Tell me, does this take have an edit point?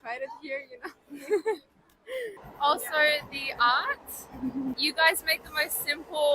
yes; 2 cuts; at 2.4 s, 4.8 s

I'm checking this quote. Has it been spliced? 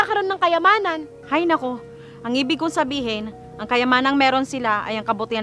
no; 0 cuts

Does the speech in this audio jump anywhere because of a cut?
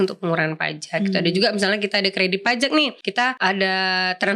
yes; 1 cut; at 3.0 s

